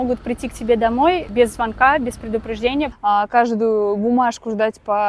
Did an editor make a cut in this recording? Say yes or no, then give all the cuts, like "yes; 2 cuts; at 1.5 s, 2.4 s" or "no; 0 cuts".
yes; 2 cuts; at 1.3 s, 2.9 s